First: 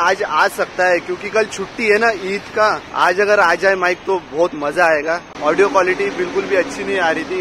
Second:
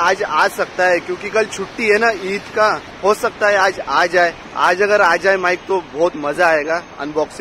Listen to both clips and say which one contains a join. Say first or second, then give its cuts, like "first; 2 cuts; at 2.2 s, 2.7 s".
first; 2 cuts; at 2.8 s, 5.3 s